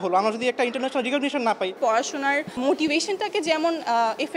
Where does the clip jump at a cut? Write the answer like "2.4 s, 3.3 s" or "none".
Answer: 1.8 s